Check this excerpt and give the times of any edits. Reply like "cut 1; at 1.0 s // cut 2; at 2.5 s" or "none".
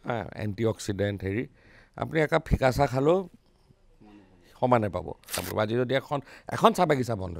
cut 1; at 5.4 s